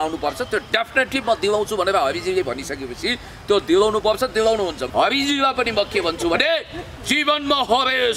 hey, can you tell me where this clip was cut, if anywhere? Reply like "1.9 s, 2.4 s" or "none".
4.8 s

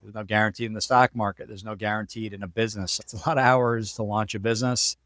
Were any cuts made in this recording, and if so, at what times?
3.0 s

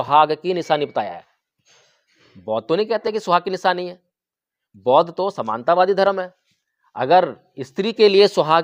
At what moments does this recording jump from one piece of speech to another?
none

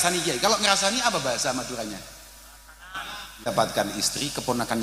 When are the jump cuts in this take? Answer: 3.5 s

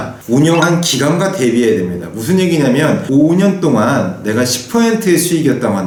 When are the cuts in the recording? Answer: none

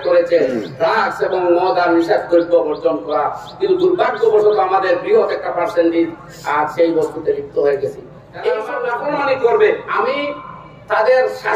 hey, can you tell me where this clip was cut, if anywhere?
8.7 s, 9.9 s

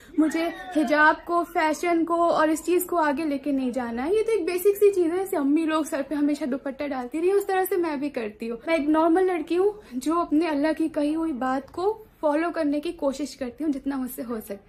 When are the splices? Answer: none

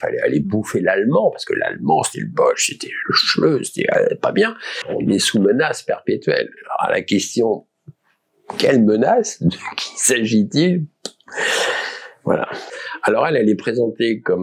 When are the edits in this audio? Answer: 4.8 s, 12.6 s

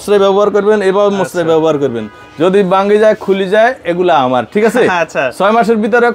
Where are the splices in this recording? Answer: none

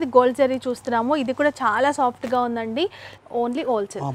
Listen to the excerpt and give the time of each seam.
3.0 s

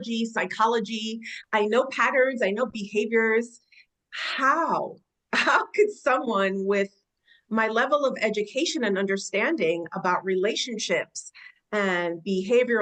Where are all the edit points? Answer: none

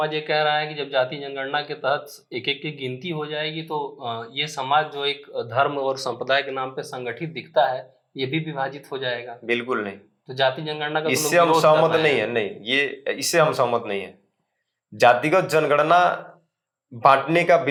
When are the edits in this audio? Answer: none

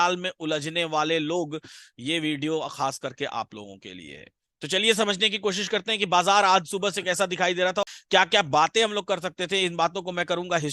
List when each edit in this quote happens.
7.8 s

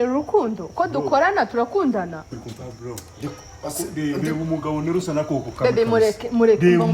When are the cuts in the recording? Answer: 2.3 s

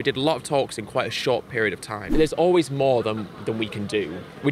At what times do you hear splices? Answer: 2.1 s

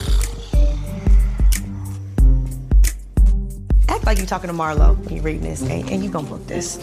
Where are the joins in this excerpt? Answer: none

